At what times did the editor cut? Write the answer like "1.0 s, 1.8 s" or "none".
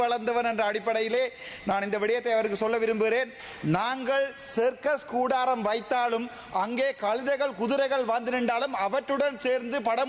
none